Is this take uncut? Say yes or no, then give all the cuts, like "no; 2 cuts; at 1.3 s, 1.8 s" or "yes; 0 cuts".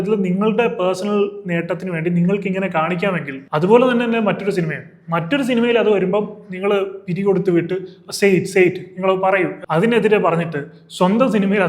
no; 1 cut; at 9.6 s